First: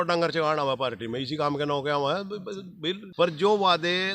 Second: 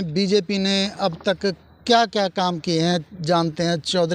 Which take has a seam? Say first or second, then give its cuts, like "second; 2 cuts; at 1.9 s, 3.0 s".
first; 1 cut; at 3.0 s